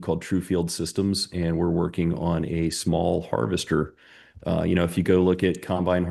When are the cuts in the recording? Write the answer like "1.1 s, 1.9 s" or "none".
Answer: none